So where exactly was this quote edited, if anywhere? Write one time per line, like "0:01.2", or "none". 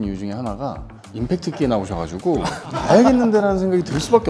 0:00.9
0:02.7

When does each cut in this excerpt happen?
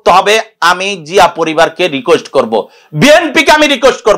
none

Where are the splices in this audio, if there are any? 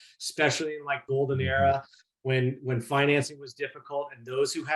0:01.0

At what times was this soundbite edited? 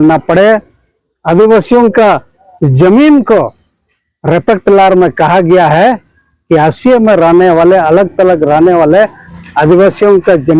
none

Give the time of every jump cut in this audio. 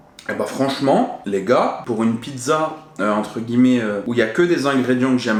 none

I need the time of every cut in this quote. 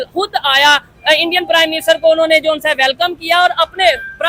none

